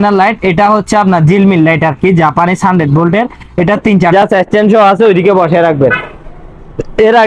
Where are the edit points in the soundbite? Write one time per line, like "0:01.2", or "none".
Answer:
0:04.1